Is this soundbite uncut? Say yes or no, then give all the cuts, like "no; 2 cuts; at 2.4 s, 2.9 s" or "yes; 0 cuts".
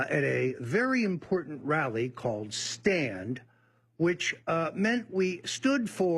no; 1 cut; at 1.9 s